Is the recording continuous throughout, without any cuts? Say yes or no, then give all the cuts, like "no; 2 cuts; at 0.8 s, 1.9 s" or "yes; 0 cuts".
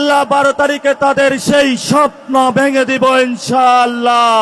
yes; 0 cuts